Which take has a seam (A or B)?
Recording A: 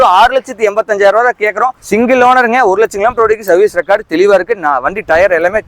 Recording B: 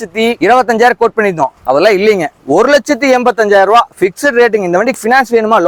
A